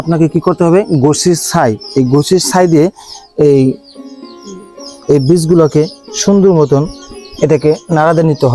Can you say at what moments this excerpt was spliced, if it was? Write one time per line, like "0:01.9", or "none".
none